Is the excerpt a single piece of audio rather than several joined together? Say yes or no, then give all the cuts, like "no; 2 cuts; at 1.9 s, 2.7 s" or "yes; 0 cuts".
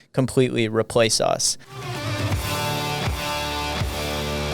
no; 1 cut; at 1.6 s